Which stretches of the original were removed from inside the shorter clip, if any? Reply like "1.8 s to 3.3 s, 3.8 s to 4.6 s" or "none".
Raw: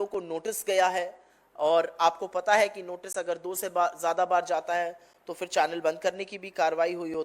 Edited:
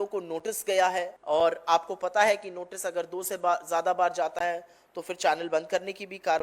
1.1 s to 1.5 s

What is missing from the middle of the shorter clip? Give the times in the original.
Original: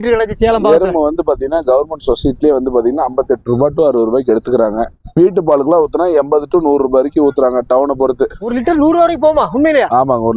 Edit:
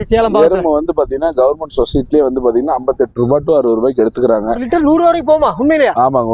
4.9 s to 8.5 s

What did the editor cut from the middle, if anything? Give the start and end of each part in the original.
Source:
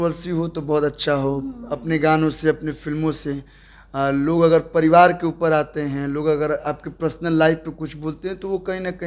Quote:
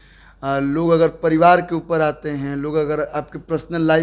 none

